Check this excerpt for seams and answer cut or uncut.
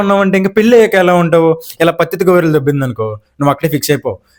uncut